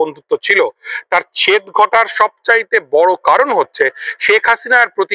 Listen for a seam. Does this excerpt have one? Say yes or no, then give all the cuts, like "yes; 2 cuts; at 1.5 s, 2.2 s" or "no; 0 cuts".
no; 0 cuts